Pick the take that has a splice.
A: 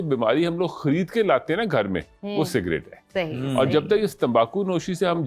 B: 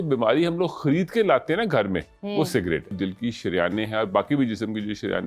B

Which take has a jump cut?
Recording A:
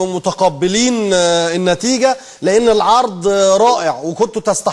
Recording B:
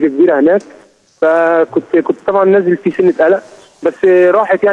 B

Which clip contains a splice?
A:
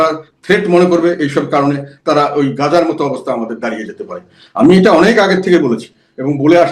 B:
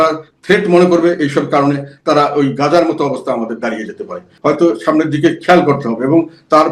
B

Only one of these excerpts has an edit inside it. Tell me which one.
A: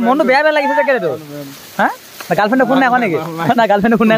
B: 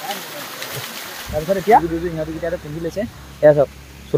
B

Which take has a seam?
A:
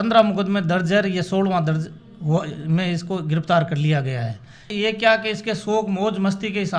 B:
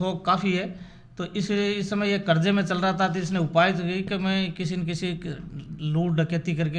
A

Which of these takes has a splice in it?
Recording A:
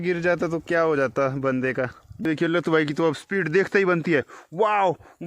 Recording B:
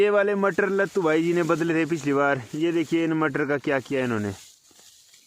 A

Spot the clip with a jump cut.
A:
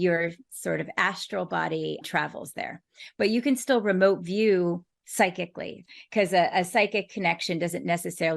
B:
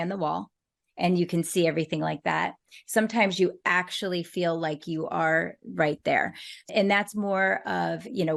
A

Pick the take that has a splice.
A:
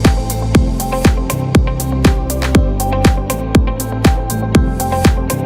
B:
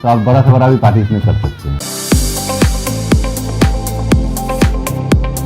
B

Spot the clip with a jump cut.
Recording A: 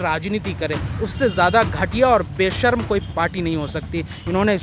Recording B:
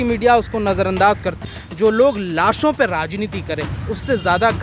B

